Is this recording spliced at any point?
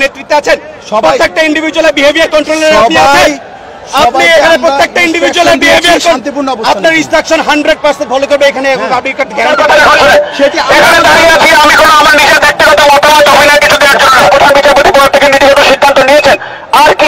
yes; 2 cuts; at 9.5 s, 14.3 s

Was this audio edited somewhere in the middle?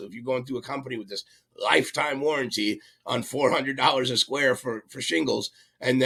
no; 0 cuts

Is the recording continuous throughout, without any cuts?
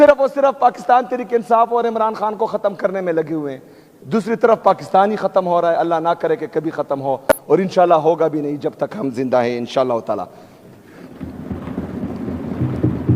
yes; 0 cuts

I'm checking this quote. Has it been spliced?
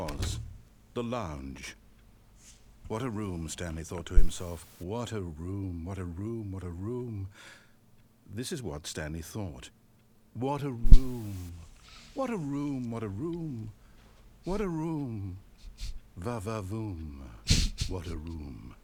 no; 0 cuts

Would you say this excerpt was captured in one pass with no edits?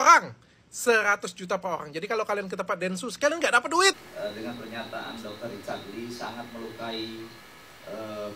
no; 1 cut; at 4.1 s

